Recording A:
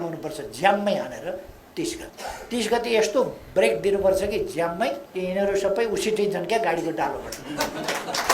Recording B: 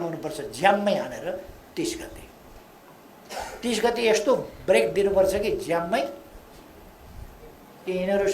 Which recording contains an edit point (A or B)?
A